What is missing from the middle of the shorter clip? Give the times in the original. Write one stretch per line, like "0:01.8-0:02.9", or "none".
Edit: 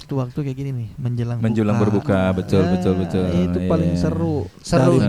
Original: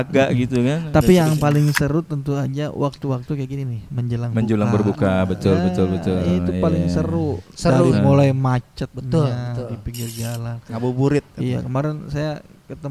none